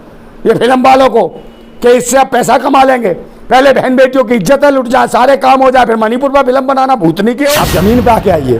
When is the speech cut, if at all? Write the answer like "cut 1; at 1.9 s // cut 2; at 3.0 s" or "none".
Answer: cut 1; at 7.5 s